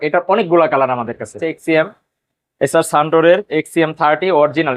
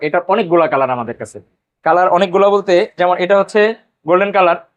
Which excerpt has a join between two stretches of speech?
first; 1 cut; at 1.5 s

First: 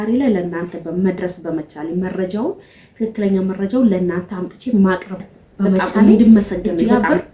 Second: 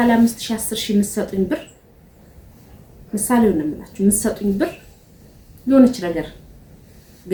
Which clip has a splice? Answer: first; 1 cut; at 5.9 s

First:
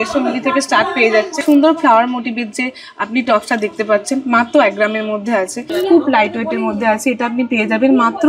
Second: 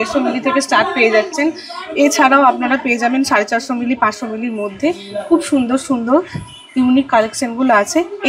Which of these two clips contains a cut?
first; 2 cuts; at 1.3 s, 5.7 s

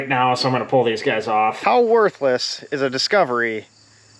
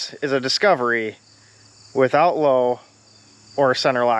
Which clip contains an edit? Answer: first; 1 cut; at 1.6 s

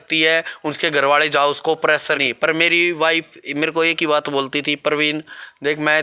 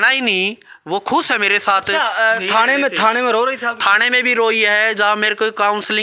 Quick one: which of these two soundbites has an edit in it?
first; 1 cut; at 2.2 s

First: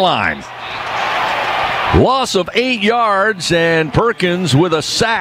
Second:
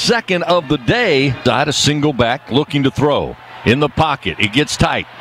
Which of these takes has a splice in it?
second; 1 cut; at 1.4 s

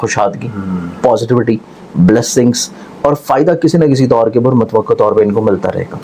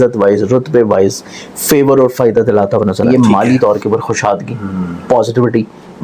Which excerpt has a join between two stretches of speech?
second; 1 cut; at 3.0 s

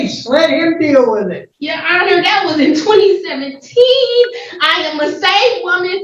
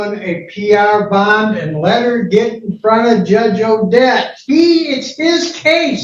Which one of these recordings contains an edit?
first; 1 cut; at 1.4 s

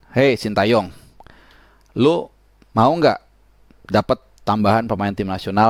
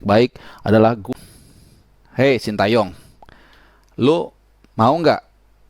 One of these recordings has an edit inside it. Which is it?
second; 1 cut; at 1.1 s

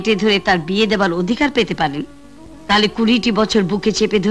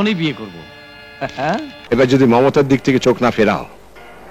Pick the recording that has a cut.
second; 1 cut; at 1.8 s

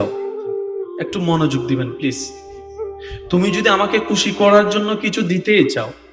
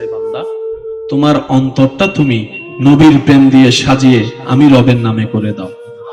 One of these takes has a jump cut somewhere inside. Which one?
second; 1 cut; at 1.1 s

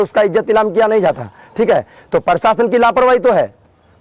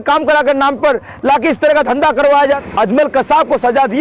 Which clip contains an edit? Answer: second; 1 cut; at 2.6 s

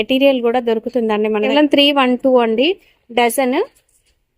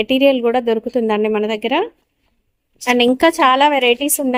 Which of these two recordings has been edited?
first; 1 cut; at 1.5 s

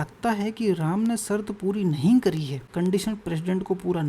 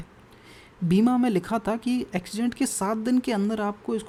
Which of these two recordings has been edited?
first; 1 cut; at 2.6 s

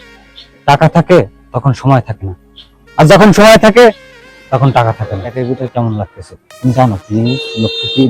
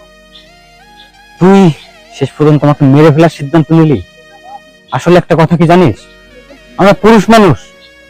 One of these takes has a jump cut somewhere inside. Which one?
first; 1 cut; at 5.3 s

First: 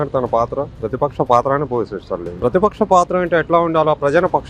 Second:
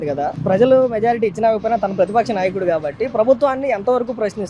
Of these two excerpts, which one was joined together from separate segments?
first; 1 cut; at 2.4 s

